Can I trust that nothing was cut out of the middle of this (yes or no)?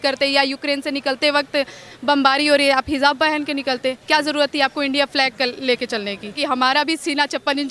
no